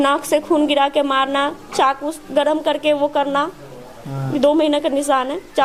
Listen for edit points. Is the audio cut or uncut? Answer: uncut